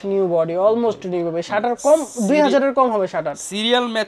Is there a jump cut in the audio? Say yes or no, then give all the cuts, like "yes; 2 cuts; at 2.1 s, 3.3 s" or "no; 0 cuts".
no; 0 cuts